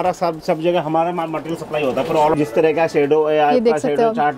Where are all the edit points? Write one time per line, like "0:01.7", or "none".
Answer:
0:02.3